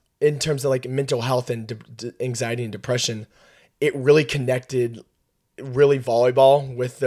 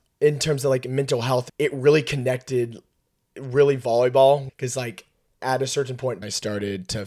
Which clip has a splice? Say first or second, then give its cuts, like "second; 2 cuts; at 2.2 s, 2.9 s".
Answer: second; 3 cuts; at 1.5 s, 4.5 s, 6.2 s